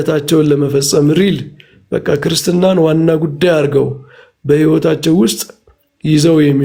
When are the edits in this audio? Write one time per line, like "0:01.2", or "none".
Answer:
none